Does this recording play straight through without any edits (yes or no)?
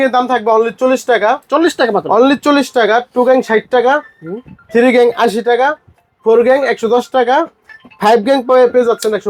yes